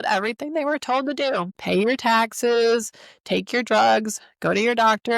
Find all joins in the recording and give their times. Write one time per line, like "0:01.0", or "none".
0:01.5